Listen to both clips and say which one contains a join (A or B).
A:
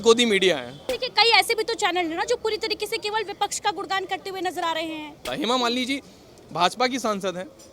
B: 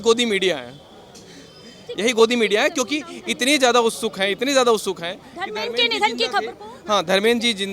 A